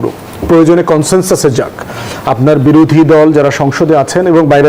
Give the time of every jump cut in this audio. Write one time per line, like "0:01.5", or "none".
none